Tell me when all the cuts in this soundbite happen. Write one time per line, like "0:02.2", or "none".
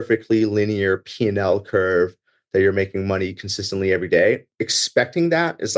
0:04.5